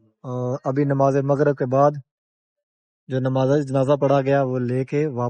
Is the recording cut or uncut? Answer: uncut